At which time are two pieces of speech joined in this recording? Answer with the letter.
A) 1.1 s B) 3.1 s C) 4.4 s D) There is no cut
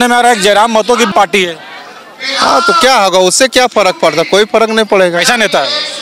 A